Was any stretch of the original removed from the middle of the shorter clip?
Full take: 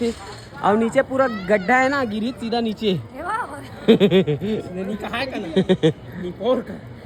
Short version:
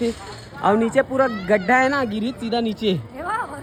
no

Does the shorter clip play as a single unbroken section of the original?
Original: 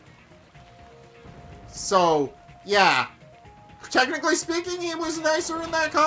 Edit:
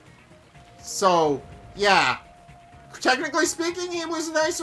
no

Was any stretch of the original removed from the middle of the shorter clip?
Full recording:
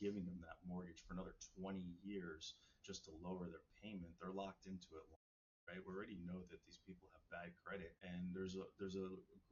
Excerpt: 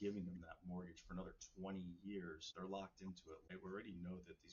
yes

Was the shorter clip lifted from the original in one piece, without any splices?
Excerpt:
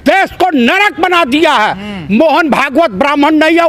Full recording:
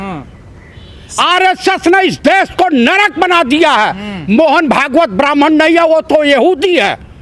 yes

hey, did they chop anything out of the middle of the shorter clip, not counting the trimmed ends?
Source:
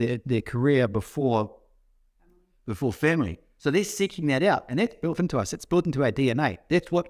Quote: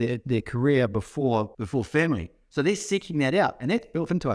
yes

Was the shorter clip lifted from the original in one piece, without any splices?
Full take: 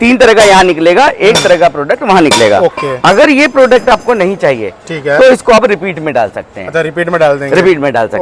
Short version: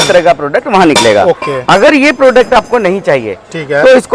yes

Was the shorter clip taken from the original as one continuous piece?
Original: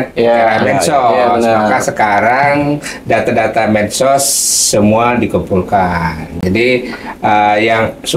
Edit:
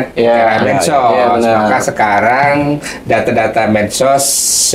yes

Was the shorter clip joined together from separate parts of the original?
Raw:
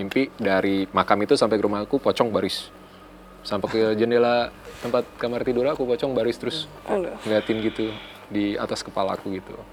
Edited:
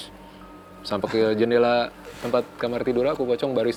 no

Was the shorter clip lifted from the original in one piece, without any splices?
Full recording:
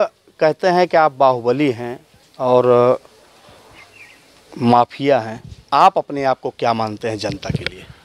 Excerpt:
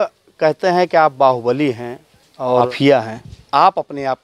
no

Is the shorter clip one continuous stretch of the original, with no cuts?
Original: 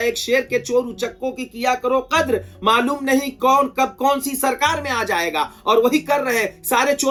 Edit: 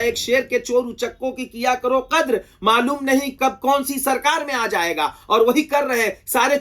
no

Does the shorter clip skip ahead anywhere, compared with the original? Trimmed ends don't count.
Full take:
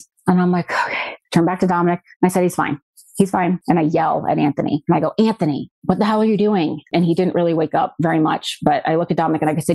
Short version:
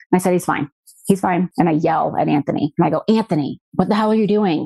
no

